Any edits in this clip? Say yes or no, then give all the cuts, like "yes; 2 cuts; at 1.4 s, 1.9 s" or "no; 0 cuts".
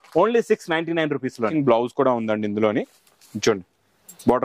yes; 1 cut; at 1.5 s